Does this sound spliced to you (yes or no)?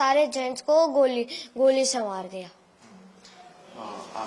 no